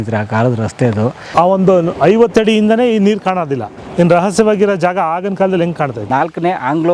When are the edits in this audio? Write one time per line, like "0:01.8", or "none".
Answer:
0:01.2
0:03.8
0:06.0

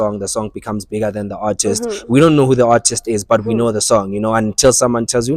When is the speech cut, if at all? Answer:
none

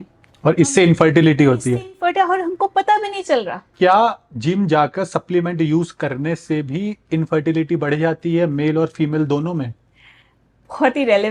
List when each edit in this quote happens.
0:03.6

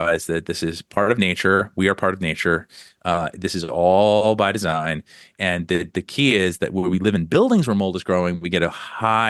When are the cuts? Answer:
none

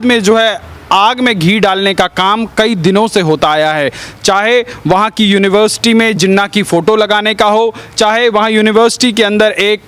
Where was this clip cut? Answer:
none

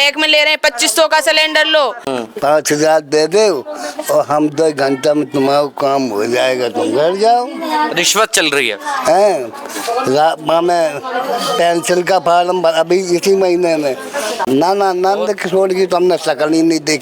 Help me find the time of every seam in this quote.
0:02.0
0:14.4

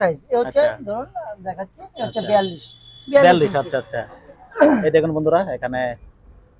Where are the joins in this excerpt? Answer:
none

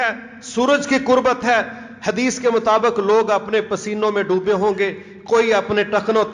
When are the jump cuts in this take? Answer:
none

